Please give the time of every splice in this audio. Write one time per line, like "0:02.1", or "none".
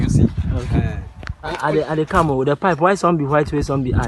0:01.5